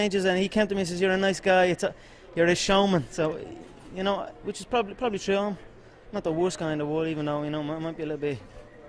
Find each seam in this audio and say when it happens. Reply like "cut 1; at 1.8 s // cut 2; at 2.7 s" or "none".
none